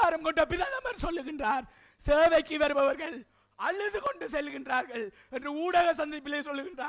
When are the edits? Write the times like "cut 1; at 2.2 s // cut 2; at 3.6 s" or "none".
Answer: none